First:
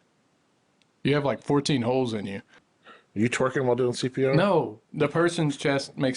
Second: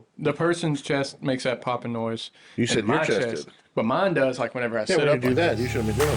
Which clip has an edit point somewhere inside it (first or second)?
first